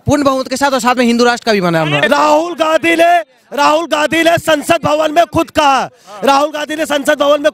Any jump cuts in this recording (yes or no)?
yes